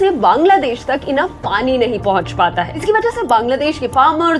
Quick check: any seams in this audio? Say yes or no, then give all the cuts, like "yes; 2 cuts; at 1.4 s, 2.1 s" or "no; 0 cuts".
yes; 1 cut; at 2.8 s